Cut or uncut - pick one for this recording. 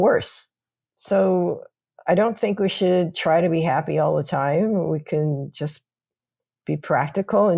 uncut